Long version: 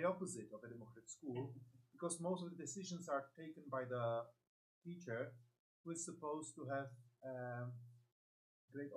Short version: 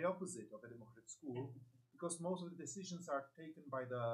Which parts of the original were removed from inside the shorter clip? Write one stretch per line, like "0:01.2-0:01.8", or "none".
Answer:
none